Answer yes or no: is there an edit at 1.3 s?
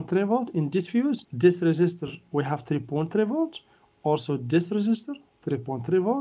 yes